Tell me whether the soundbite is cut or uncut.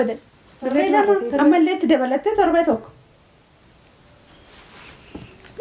cut